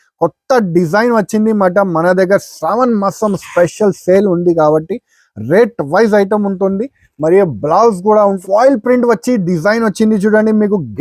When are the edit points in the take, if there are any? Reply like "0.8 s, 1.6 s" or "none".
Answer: 8.4 s